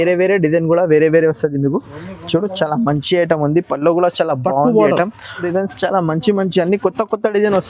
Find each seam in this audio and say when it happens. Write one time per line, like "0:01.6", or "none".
0:05.4